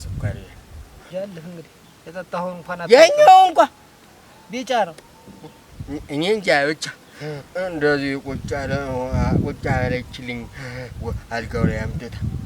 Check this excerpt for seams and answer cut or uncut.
cut